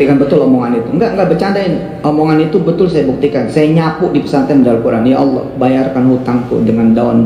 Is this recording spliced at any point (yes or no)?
no